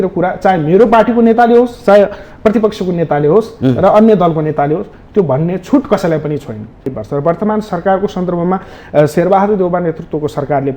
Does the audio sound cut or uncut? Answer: cut